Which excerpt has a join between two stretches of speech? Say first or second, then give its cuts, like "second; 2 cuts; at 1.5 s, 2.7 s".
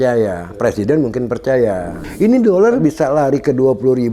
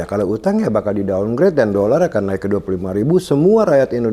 first; 2 cuts; at 2.0 s, 2.8 s